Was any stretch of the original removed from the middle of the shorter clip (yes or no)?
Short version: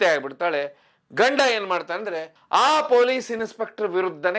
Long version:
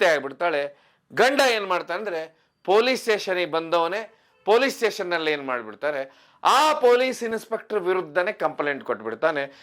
yes